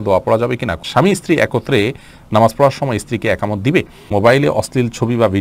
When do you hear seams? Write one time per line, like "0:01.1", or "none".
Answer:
0:00.8
0:04.1